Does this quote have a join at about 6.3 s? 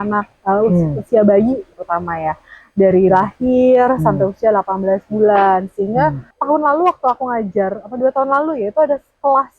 yes; 1 cut; at 6.3 s

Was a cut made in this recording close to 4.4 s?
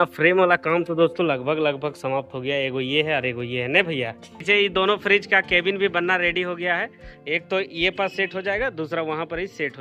yes; 1 cut; at 4.4 s

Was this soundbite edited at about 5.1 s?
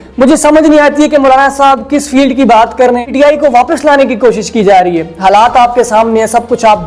no; 1 cut; at 3.1 s

